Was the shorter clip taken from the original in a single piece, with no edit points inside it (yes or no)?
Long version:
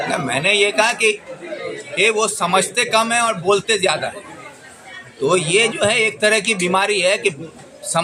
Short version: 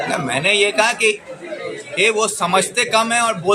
yes